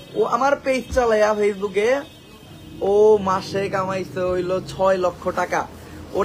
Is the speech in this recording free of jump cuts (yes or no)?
yes